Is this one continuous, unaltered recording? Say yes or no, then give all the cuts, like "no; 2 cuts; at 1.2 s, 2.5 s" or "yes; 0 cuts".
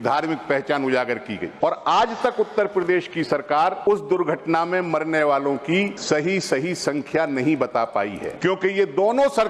no; 4 cuts; at 1.5 s, 3.9 s, 5.9 s, 8.2 s